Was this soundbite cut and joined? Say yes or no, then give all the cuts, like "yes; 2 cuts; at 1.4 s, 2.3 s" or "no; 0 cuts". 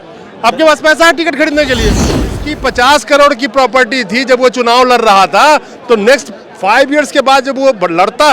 yes; 1 cut; at 2.3 s